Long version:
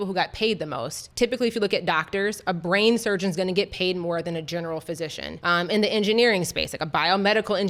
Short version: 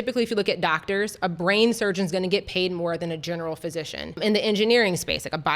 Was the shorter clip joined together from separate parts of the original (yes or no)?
yes